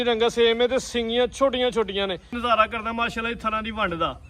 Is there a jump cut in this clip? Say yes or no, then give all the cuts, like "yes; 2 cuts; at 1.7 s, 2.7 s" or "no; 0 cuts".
yes; 1 cut; at 2.3 s